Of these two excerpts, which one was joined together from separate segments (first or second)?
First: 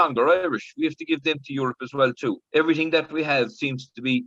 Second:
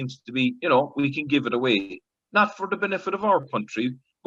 first